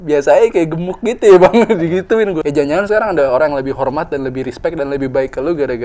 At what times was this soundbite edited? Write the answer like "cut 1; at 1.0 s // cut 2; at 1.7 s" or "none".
cut 1; at 2.4 s